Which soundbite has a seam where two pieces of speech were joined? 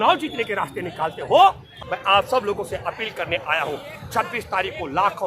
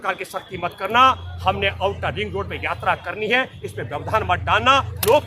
first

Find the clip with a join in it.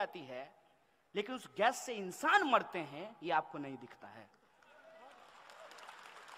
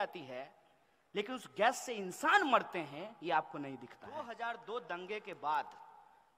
second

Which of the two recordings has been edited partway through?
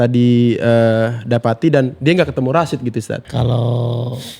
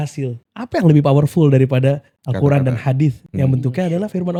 first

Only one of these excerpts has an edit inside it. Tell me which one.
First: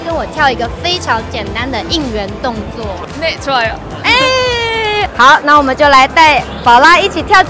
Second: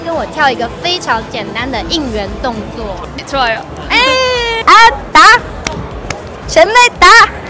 second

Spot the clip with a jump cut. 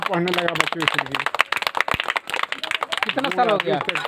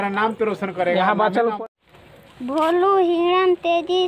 second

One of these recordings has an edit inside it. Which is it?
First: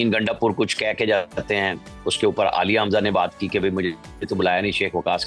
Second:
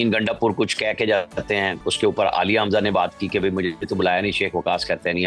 second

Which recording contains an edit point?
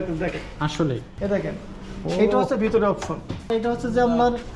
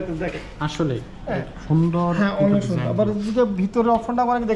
first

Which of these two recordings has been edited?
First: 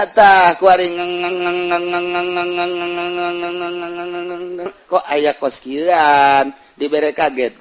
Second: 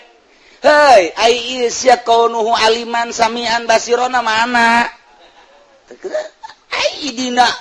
first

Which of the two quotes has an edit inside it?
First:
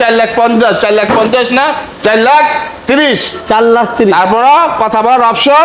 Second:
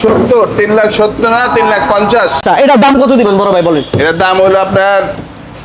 second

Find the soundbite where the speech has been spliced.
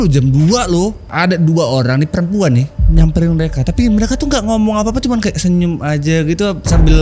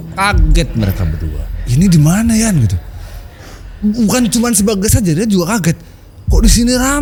first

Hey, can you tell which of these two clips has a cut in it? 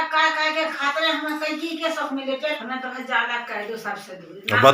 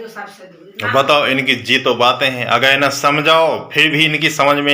first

